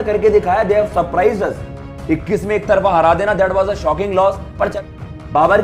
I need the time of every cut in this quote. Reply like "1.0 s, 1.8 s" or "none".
4.7 s